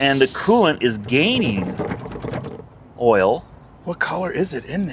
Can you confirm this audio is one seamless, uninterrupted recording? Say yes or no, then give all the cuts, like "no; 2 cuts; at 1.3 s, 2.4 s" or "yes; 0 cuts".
yes; 0 cuts